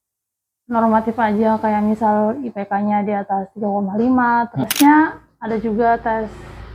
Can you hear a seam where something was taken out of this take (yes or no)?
yes